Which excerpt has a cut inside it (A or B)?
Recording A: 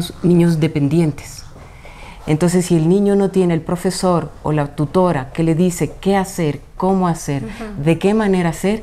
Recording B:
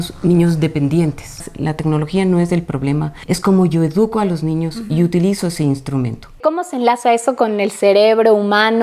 B